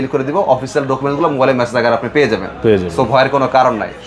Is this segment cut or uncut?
uncut